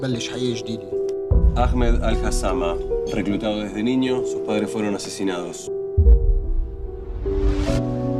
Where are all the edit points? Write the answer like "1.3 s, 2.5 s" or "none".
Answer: 3.5 s